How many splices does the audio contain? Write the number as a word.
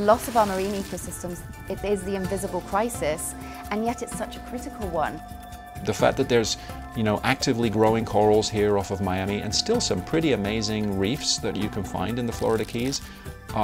two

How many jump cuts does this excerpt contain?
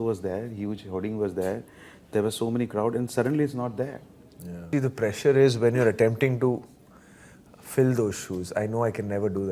one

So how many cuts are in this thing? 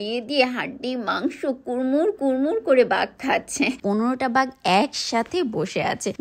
one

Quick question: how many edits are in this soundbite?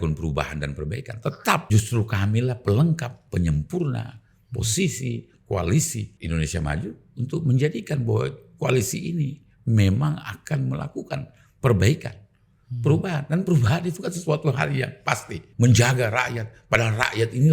three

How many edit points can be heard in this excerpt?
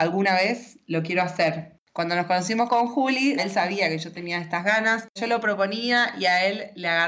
three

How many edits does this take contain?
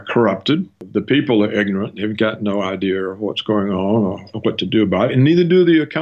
one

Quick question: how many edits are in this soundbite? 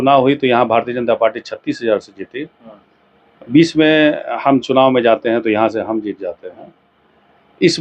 zero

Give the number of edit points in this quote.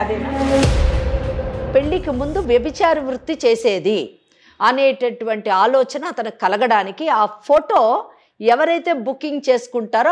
one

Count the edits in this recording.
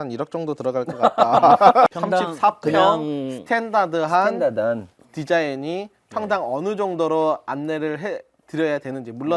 one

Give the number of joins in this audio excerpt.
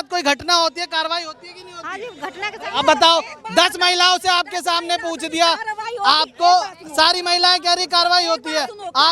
zero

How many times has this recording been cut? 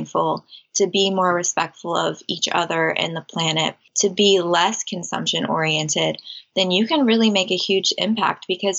one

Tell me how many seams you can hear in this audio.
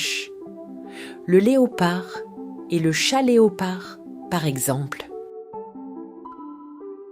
one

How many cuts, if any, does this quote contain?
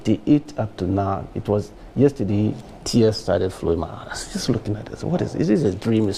zero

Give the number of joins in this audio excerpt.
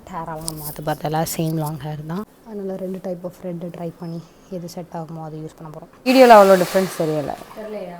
two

